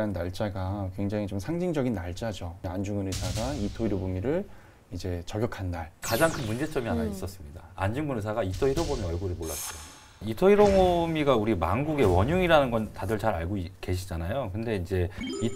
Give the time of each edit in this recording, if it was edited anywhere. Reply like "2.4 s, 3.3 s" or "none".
2.7 s, 6.0 s, 10.2 s